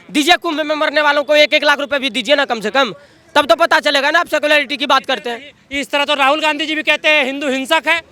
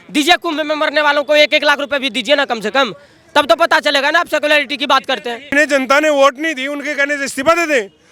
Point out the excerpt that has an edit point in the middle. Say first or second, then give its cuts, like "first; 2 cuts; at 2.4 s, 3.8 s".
second; 1 cut; at 5.5 s